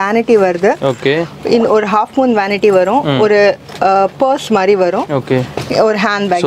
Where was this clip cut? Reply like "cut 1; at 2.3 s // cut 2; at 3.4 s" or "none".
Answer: none